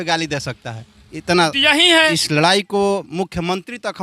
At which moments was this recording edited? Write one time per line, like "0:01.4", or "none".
0:02.1